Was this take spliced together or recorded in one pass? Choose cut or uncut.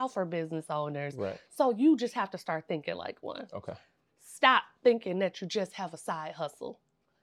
uncut